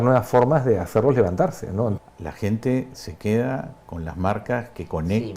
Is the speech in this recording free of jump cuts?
no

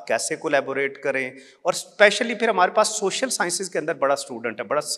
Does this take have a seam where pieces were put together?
no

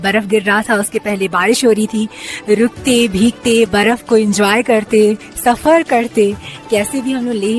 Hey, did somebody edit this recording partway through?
no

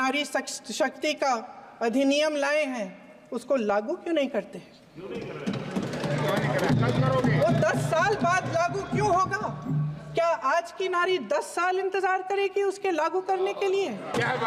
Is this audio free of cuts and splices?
yes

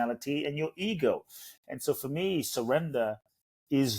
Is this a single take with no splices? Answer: yes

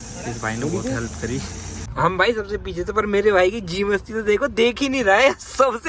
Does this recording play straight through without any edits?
no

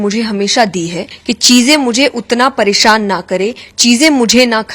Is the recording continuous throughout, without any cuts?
no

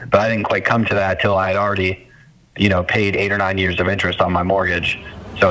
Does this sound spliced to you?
no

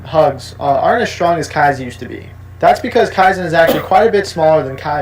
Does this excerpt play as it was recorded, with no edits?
no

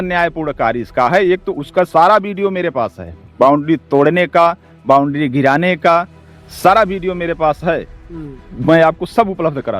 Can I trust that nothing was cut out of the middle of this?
yes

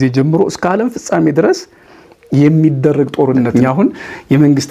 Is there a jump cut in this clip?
yes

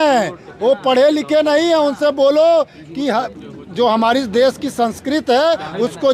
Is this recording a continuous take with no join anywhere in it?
yes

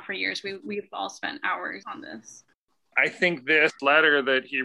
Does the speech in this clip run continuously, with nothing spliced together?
no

